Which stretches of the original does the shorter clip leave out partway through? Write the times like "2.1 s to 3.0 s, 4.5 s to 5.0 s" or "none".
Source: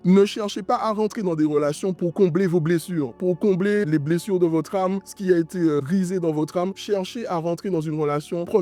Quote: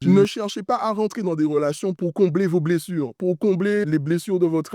none